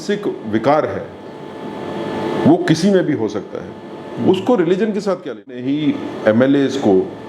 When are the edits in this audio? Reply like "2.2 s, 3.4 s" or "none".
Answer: 5.7 s